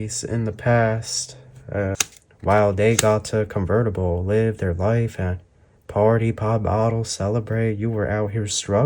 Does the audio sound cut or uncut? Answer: cut